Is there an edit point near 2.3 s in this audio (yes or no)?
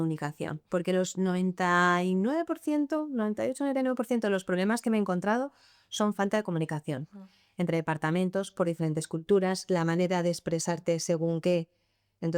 no